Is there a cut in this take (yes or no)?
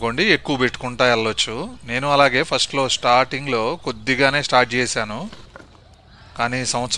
no